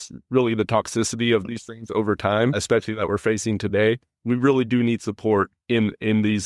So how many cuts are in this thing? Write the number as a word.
two